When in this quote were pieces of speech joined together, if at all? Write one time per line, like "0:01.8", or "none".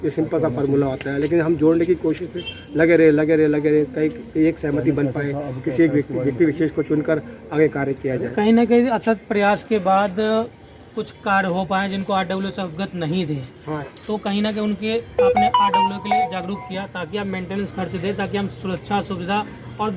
none